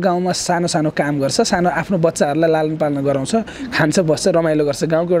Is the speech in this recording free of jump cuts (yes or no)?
yes